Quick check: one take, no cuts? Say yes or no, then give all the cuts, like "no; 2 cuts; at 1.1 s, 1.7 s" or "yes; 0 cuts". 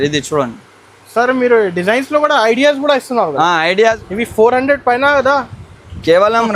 no; 1 cut; at 4.0 s